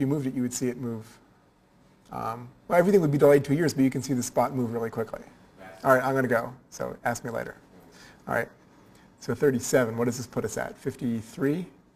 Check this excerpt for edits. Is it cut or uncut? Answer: uncut